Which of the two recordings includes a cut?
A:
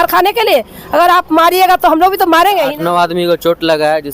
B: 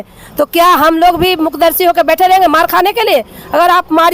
A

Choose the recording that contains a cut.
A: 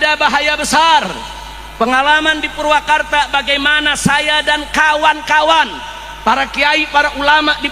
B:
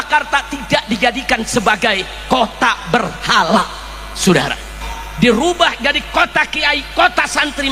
B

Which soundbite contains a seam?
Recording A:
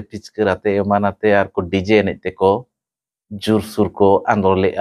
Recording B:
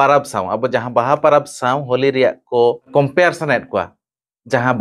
B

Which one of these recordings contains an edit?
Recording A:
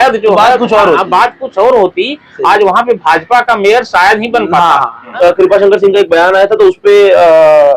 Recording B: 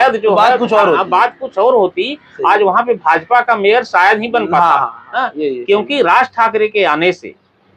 A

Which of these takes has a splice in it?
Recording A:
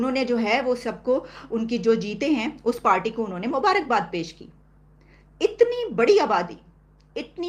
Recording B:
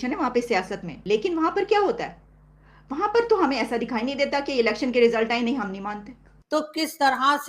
B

